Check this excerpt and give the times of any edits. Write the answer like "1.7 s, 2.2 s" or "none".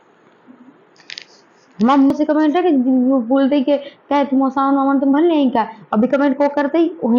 2.1 s